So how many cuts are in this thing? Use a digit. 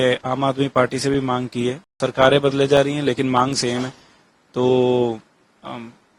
1